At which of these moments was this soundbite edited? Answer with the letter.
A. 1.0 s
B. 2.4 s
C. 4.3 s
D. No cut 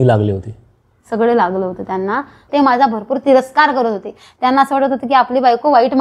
B